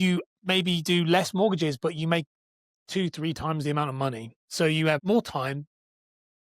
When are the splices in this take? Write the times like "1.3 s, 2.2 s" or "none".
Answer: 5.0 s